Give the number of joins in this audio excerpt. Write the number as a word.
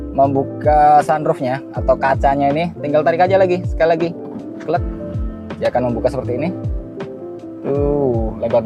zero